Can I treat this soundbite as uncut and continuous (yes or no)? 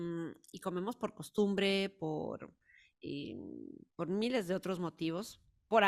yes